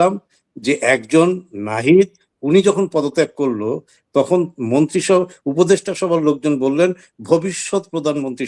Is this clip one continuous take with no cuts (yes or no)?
yes